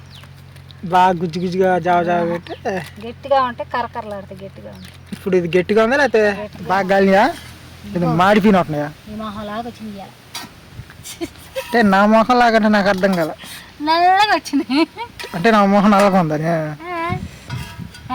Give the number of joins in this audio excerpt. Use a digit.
1